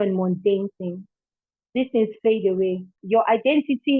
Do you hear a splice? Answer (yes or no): yes